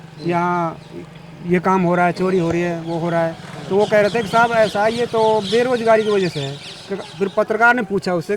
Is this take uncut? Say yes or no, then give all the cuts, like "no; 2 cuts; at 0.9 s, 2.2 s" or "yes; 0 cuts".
yes; 0 cuts